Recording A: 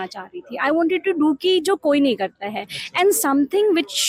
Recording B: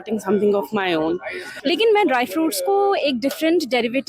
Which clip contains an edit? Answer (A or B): B